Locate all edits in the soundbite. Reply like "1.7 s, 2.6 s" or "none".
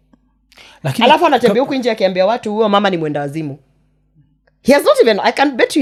none